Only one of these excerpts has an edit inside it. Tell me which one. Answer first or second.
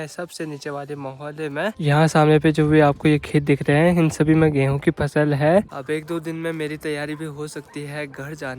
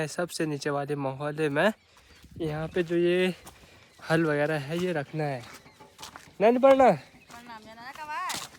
first